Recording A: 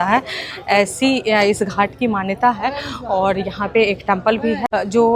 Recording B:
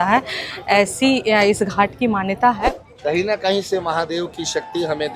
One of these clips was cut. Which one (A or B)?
B